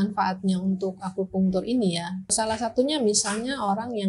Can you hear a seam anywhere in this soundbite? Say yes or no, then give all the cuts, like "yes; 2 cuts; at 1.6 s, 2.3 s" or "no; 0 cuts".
yes; 1 cut; at 2.3 s